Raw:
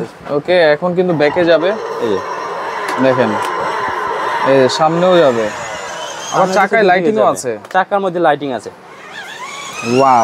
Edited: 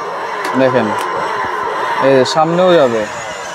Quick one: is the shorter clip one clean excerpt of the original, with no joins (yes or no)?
yes